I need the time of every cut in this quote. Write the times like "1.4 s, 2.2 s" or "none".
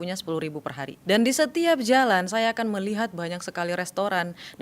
1.0 s